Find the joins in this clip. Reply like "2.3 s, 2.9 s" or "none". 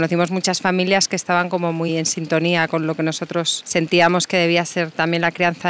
none